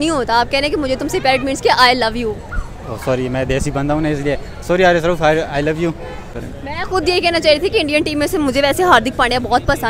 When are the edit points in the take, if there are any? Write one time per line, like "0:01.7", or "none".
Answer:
0:06.4